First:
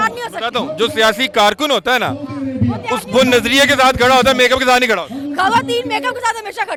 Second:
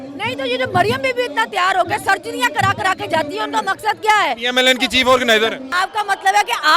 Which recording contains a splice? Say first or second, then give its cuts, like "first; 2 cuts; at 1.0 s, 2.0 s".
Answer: second; 1 cut; at 5.7 s